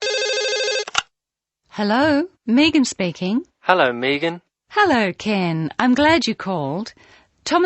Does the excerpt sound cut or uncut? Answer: cut